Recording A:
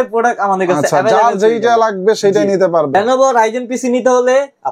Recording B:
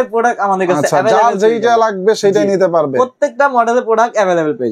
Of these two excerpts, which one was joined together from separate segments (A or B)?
A